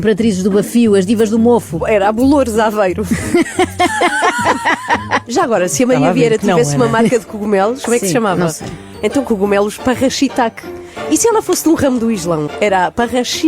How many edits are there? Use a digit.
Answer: 1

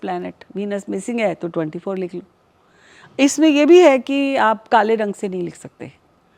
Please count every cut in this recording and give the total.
0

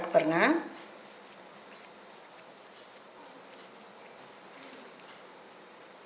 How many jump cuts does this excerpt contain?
1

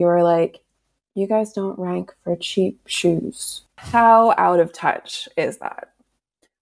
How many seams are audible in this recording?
1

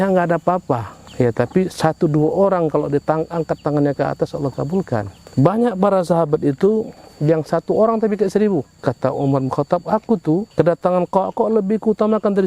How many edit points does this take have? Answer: 4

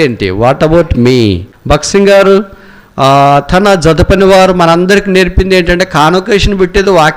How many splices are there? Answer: 1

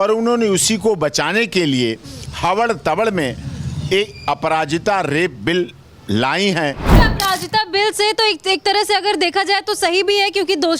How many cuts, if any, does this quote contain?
1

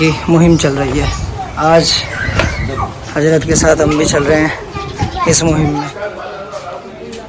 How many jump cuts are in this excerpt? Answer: 2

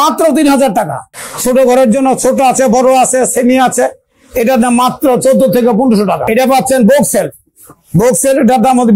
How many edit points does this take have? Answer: 2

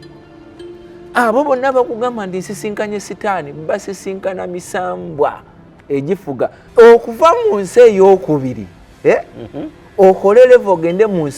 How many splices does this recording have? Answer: 1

